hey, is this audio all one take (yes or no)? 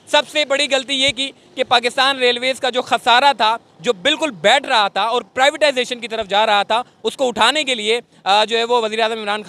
yes